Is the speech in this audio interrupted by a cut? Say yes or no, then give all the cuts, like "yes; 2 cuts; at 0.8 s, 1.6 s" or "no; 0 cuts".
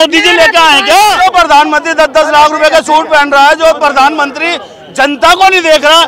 yes; 1 cut; at 1.2 s